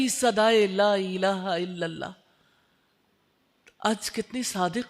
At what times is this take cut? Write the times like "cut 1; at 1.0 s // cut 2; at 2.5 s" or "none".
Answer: none